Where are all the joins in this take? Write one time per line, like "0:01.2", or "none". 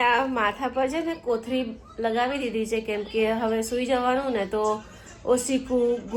none